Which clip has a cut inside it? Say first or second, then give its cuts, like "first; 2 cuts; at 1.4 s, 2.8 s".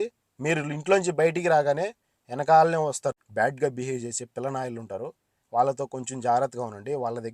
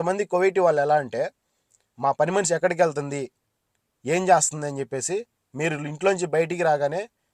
first; 1 cut; at 3.1 s